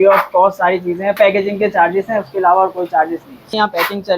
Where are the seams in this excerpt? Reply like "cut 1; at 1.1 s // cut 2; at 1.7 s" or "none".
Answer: cut 1; at 1.1 s